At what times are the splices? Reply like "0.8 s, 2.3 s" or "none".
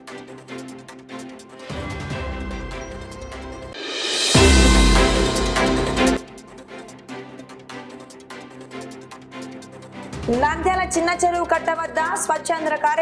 3.2 s, 6.2 s, 9.4 s